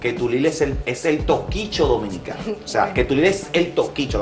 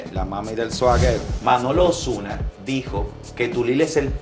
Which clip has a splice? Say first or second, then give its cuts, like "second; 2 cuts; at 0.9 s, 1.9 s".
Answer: second; 1 cut; at 1.3 s